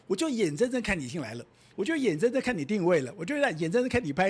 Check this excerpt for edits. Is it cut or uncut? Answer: uncut